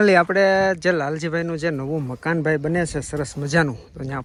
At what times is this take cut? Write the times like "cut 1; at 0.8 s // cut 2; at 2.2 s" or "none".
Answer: none